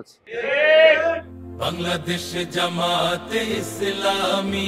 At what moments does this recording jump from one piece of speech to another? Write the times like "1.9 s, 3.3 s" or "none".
1.3 s